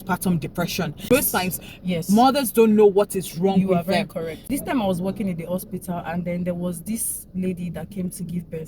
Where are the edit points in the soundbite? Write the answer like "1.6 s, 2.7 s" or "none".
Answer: 1.1 s, 4.5 s

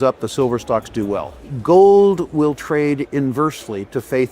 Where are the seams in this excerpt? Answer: 1.5 s

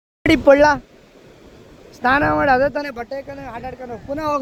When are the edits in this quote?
none

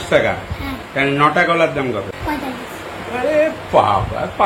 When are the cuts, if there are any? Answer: 2.1 s

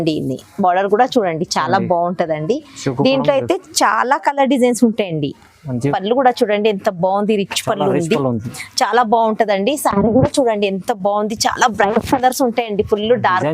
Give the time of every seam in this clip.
5.9 s

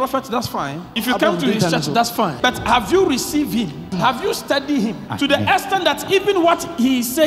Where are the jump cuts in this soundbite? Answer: 1.0 s, 2.4 s, 3.9 s, 5.0 s

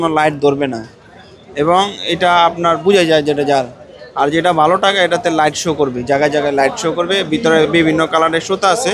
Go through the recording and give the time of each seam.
none

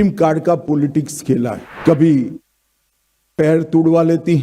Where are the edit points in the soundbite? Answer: 1.7 s

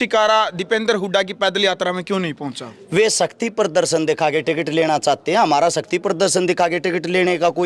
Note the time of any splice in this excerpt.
none

